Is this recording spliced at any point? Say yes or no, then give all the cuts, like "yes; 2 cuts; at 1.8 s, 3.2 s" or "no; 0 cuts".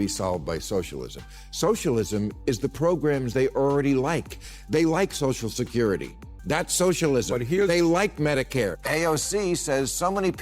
yes; 1 cut; at 8.7 s